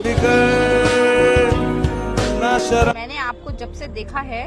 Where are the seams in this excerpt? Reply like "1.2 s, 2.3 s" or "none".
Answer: 3.0 s

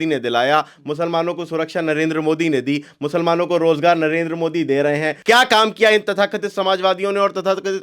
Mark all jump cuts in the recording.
5.1 s

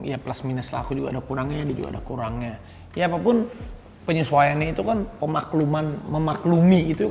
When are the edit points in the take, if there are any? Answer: none

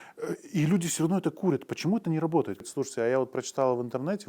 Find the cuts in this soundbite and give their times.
2.6 s

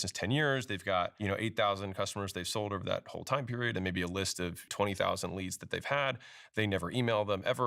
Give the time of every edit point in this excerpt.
none

